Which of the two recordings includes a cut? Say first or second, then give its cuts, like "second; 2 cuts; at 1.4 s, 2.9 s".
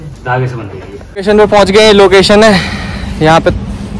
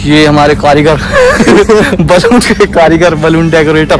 first; 1 cut; at 1.2 s